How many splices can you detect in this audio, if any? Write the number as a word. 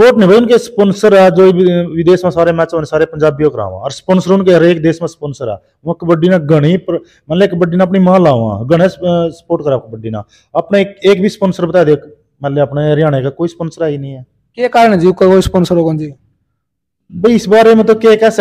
zero